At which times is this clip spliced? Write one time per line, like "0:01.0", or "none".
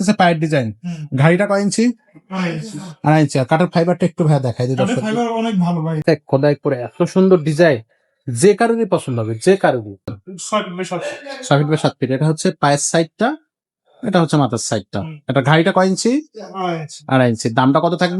0:06.0
0:10.2

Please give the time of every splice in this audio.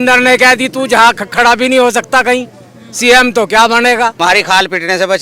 0:04.1

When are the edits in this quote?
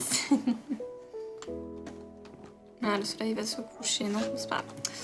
0:03.7

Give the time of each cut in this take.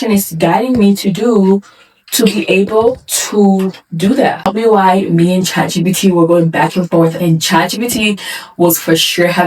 0:04.4

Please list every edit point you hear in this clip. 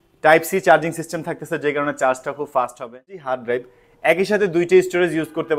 0:03.2

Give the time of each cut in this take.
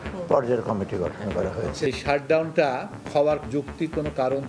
0:01.8

